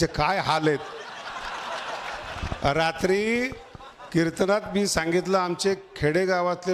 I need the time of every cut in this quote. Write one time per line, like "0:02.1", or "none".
none